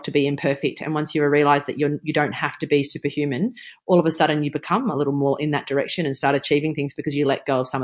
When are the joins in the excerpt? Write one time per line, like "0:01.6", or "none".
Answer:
none